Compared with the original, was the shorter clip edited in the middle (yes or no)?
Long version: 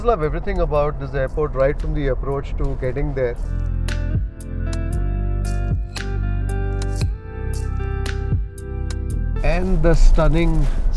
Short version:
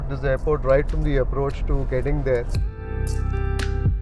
yes